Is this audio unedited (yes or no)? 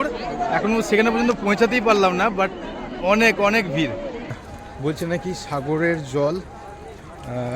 no